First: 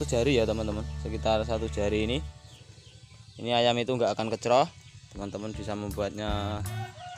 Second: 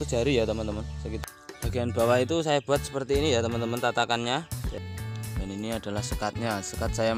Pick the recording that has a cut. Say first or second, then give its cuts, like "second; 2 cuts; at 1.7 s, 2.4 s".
second; 2 cuts; at 1.1 s, 4.7 s